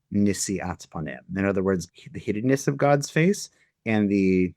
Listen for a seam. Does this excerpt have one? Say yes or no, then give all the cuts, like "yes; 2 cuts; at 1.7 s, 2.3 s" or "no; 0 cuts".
yes; 1 cut; at 1.9 s